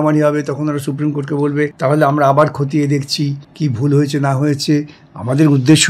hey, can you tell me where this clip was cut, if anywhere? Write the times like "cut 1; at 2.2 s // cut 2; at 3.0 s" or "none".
cut 1; at 1.7 s // cut 2; at 3.4 s